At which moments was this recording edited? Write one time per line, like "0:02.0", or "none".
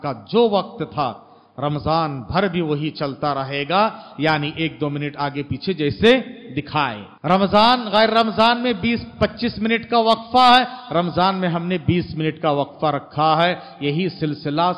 0:07.1